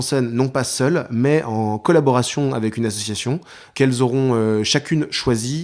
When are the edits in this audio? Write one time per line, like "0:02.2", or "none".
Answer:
0:03.7